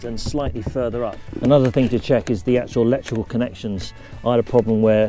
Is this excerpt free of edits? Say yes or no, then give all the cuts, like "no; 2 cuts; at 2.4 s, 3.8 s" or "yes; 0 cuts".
no; 1 cut; at 1.2 s